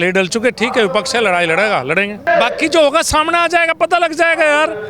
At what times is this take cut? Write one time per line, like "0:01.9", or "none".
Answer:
0:02.2